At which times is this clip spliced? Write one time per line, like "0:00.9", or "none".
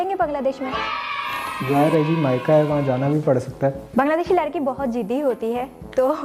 0:03.8

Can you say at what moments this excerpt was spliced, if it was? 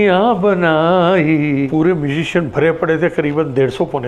0:01.7

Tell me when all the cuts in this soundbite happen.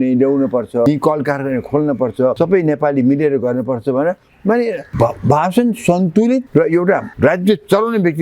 0:00.8
0:02.3
0:04.9
0:06.9

